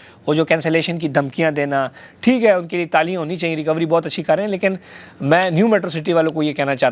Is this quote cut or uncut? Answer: uncut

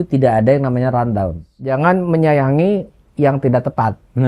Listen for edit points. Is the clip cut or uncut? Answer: cut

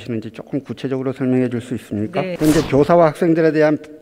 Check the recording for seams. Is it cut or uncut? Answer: cut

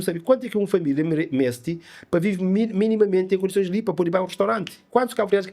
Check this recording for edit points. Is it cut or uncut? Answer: uncut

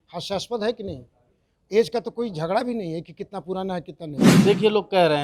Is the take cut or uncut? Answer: cut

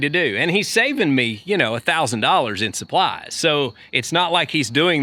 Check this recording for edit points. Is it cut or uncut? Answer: uncut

